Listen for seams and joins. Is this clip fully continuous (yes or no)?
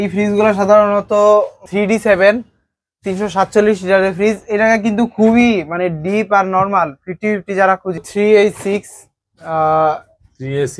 no